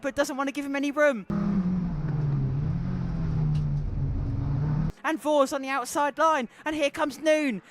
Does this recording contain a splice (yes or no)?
yes